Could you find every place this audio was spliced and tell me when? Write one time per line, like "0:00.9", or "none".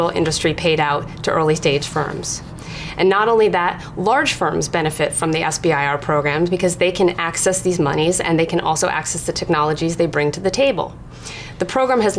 0:05.5